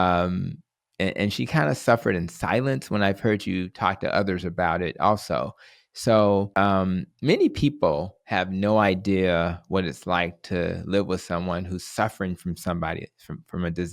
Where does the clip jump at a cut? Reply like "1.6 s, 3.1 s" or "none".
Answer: 6.5 s